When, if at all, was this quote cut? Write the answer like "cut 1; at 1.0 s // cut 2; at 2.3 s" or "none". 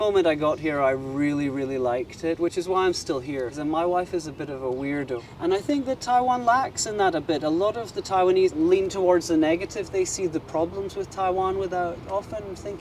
cut 1; at 3.6 s // cut 2; at 5.2 s // cut 3; at 8.5 s